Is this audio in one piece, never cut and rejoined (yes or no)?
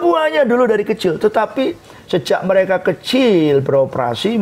yes